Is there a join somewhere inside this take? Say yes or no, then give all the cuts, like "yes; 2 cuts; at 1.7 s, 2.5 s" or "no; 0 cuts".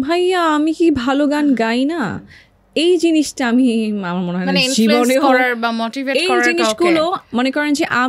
no; 0 cuts